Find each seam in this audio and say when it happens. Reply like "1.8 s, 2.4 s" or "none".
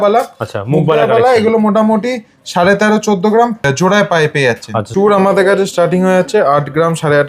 3.6 s, 4.9 s